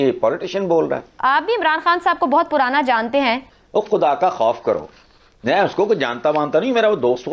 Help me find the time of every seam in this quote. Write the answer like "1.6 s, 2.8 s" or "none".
1.1 s, 3.5 s